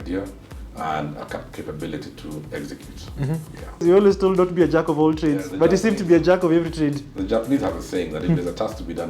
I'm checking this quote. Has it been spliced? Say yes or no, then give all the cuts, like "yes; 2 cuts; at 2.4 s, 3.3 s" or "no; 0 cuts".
yes; 1 cut; at 3.8 s